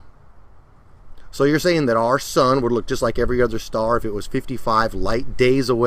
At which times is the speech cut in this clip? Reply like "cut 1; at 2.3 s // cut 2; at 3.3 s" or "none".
cut 1; at 3.5 s